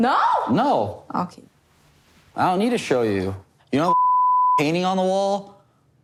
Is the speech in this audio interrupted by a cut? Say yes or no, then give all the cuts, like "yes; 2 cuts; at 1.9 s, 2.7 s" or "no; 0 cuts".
no; 0 cuts